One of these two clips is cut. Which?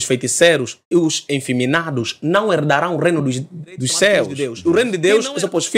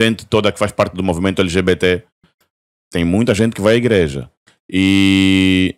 first; 1 cut; at 4.4 s

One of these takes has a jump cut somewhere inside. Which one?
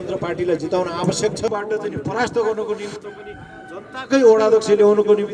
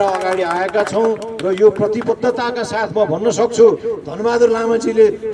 first; 1 cut; at 1.5 s

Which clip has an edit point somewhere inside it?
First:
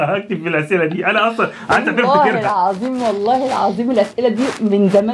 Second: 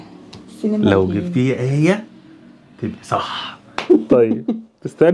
second; 1 cut; at 3.7 s

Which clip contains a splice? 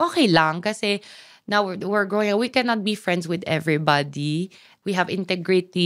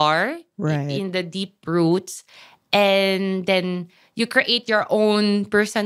first; 1 cut; at 4.7 s

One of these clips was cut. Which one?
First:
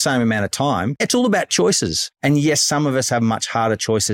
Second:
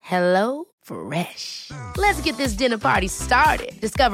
first; 2 cuts; at 1.0 s, 2.0 s

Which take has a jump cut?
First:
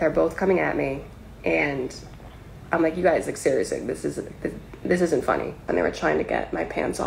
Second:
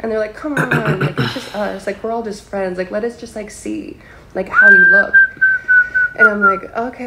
first; 1 cut; at 5.6 s

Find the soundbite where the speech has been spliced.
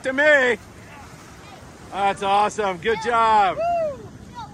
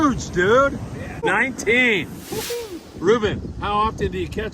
second; 1 cut; at 1.2 s

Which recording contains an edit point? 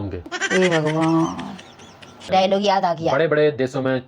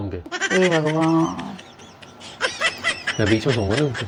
first; 1 cut; at 2.2 s

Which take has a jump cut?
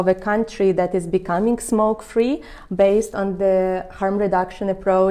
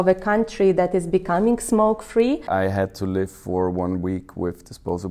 second; 1 cut; at 2.4 s

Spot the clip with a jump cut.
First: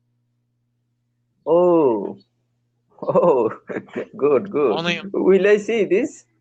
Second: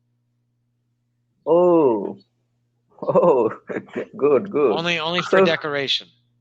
first; 1 cut; at 5.0 s

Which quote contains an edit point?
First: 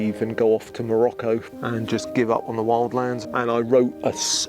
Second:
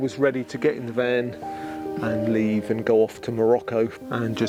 first; 1 cut; at 3.3 s

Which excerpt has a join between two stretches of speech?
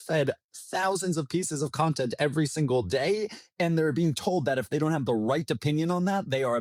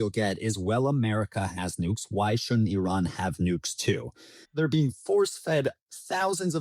second; 1 cut; at 4.4 s

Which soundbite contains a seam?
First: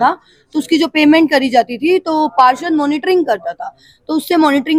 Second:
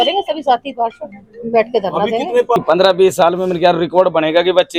second; 1 cut; at 2.6 s

